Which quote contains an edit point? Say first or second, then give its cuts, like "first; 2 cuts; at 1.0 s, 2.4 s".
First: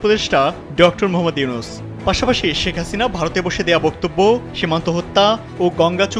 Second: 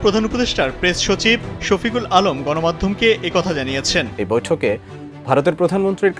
second; 1 cut; at 4.1 s